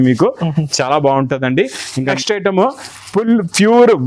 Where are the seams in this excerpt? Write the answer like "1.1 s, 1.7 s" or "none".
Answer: 2.2 s